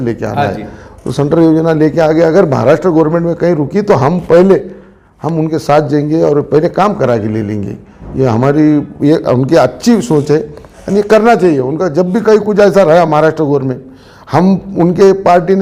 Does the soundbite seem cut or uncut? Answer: uncut